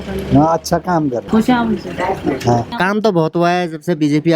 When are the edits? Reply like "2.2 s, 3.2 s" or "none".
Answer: 1.2 s, 2.7 s